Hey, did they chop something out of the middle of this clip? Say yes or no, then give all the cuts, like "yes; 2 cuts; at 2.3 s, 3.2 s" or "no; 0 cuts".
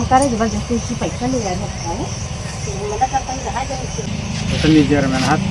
yes; 1 cut; at 4.1 s